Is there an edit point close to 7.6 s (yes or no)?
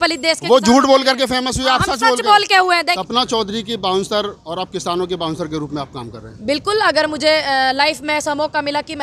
no